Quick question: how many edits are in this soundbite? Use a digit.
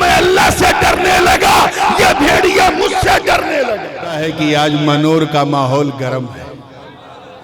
1